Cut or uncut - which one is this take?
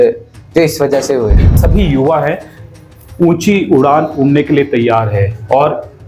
cut